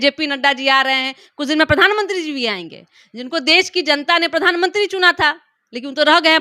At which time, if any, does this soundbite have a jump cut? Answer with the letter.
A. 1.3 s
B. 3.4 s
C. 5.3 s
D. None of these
D